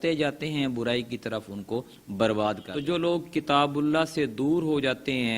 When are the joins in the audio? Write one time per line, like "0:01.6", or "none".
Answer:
0:02.7